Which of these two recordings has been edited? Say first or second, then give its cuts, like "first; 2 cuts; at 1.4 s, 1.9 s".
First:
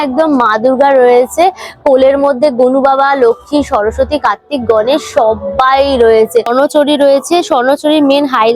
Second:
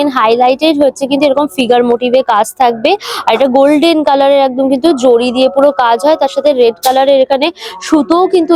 first; 1 cut; at 6.5 s